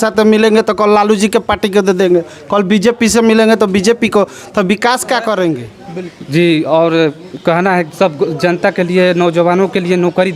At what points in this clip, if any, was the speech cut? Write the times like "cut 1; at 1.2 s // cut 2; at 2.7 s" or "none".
cut 1; at 5.6 s